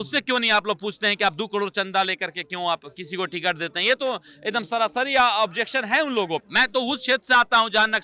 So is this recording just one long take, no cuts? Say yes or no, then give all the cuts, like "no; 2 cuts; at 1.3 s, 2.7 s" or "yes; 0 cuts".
no; 1 cut; at 6.5 s